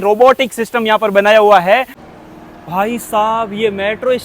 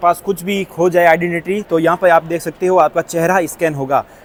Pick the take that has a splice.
first; 1 cut; at 2.0 s

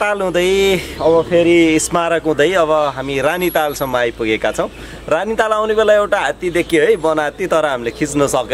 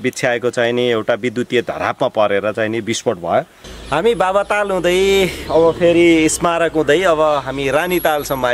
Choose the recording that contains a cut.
second; 1 cut; at 3.6 s

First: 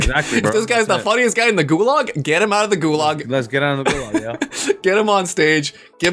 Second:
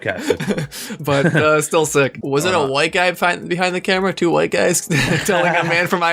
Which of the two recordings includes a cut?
second; 1 cut; at 2.2 s

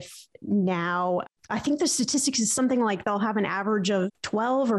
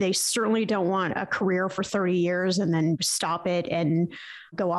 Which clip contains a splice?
first; 1 cut; at 1.4 s

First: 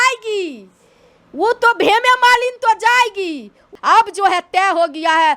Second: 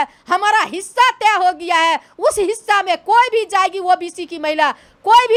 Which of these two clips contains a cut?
first; 1 cut; at 3.7 s

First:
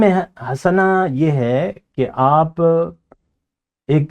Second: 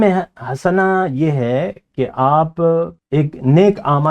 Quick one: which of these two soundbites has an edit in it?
second; 1 cut; at 3.0 s

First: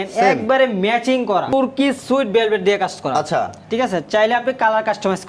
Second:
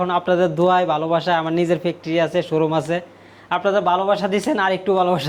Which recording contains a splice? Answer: first; 1 cut; at 1.5 s

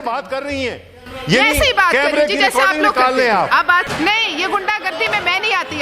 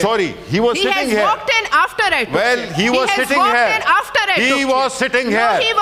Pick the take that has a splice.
first; 1 cut; at 3.9 s

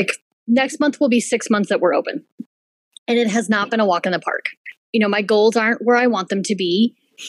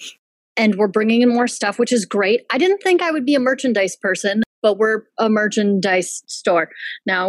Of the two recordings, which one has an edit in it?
second; 1 cut; at 4.5 s

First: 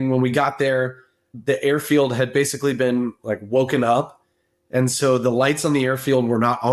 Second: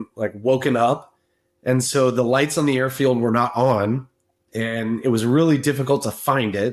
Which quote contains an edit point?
first; 1 cut; at 1.3 s

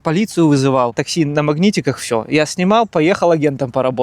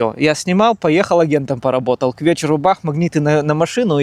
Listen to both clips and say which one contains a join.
first; 1 cut; at 1.0 s

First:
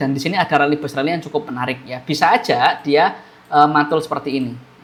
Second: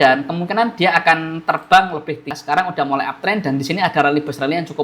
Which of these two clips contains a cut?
second; 1 cut; at 2.3 s

